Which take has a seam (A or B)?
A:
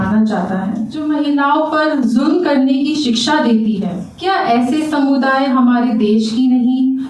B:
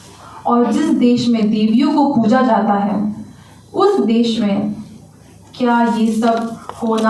A